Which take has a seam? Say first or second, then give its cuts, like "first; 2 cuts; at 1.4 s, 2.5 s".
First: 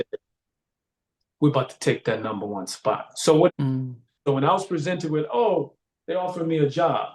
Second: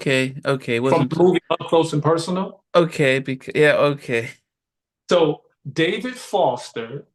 first; 1 cut; at 3.5 s